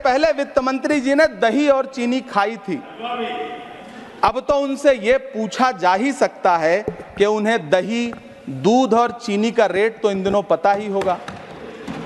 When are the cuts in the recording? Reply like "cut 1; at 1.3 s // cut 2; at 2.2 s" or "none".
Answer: none